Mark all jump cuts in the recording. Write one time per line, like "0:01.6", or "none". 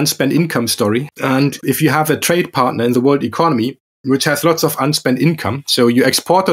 0:01.4